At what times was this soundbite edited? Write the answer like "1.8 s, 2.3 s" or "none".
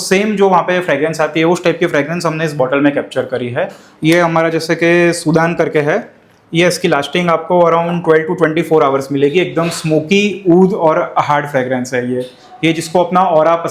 3.8 s